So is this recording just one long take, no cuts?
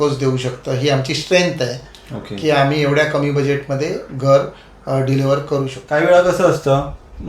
no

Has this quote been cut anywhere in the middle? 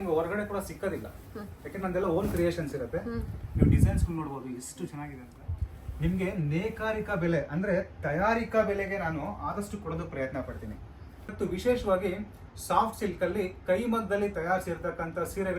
yes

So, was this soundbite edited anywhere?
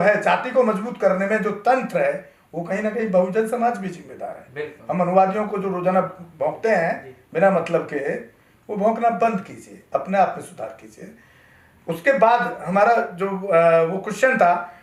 no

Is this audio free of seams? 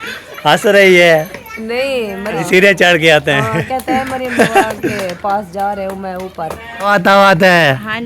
no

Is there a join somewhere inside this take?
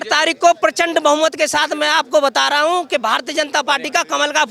no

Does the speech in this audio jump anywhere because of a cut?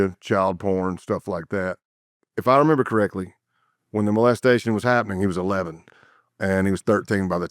yes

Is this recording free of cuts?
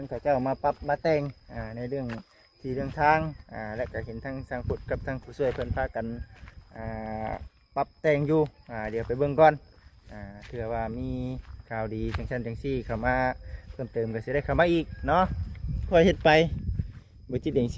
no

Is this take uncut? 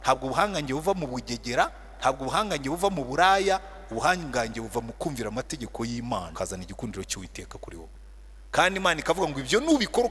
no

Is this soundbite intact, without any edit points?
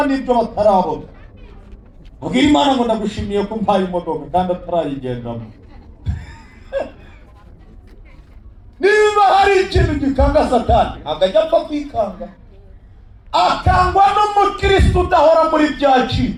yes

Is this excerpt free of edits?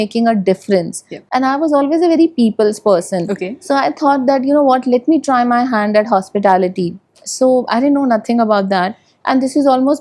yes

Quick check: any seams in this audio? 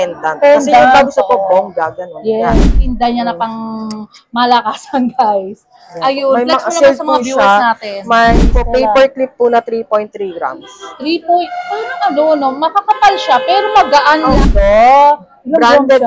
yes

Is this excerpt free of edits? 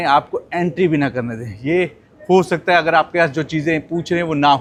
yes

